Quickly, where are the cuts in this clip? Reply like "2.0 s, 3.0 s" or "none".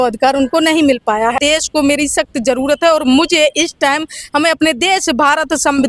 1.4 s